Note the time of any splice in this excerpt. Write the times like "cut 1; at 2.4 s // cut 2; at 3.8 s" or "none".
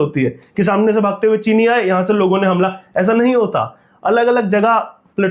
none